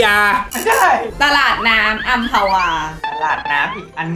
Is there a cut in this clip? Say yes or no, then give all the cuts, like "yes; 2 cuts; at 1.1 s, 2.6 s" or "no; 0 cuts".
yes; 2 cuts; at 1.1 s, 3.0 s